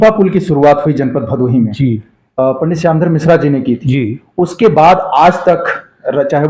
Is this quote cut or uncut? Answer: uncut